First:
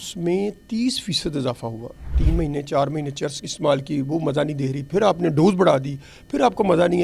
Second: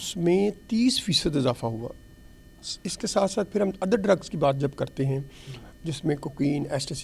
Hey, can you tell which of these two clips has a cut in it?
first; 1 cut; at 2.2 s

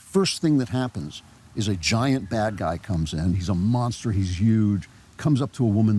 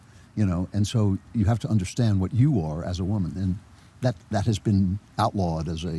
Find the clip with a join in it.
first; 2 cuts; at 1.2 s, 3.4 s

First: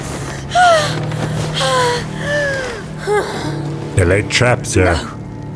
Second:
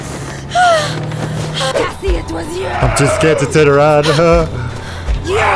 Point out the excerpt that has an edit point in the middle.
second; 1 cut; at 1.7 s

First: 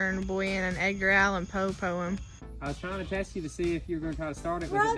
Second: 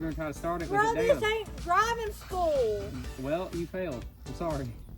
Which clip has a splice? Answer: first; 1 cut; at 2.3 s

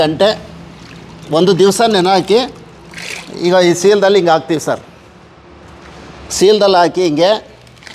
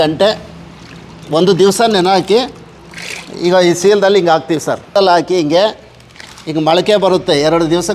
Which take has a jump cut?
second; 1 cut; at 4.9 s

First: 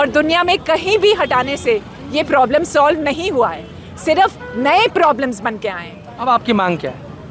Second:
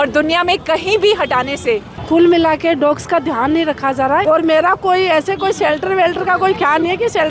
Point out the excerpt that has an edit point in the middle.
second; 2 cuts; at 1.9 s, 4.2 s

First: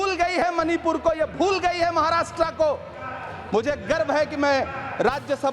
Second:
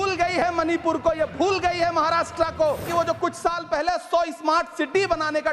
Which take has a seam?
second; 1 cut; at 2.8 s

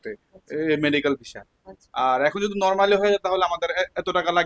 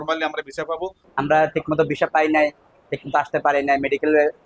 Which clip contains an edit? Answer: second; 1 cut; at 1.0 s

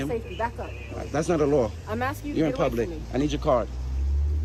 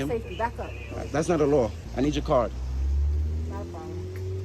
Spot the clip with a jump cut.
second; 1 cut; at 1.8 s

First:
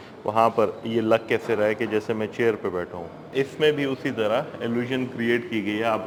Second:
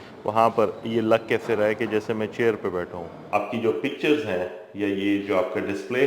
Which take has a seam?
second; 1 cut; at 3.3 s

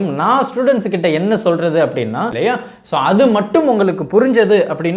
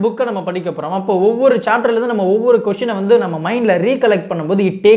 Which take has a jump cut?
first; 1 cut; at 2.3 s

